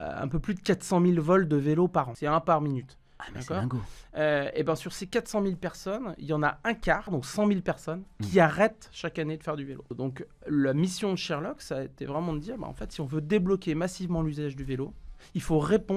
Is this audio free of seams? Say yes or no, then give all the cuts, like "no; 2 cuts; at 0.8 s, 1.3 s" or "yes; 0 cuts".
no; 3 cuts; at 2.2 s, 7.1 s, 9.9 s